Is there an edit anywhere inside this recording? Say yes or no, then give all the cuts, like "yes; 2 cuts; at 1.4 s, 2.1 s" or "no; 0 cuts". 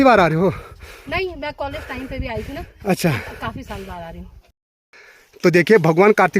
yes; 1 cut; at 4.4 s